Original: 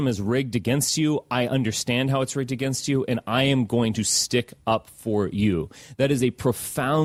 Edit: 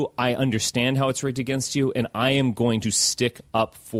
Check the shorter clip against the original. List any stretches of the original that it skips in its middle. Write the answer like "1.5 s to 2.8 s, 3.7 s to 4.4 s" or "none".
none